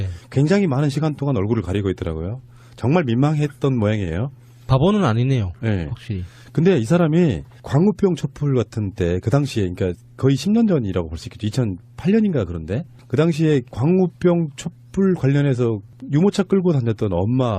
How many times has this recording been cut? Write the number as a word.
one